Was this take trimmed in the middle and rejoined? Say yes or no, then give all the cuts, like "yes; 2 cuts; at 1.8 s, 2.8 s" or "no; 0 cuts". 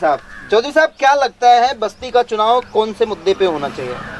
no; 0 cuts